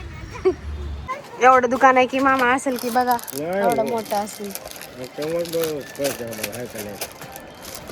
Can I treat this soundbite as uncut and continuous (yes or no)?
no